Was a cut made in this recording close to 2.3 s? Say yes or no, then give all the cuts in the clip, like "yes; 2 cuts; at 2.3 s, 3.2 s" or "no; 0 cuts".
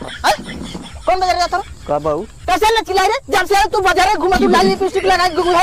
yes; 1 cut; at 2.3 s